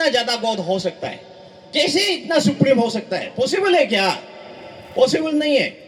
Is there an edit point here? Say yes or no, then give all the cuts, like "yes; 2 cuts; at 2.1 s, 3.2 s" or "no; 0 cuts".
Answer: no; 0 cuts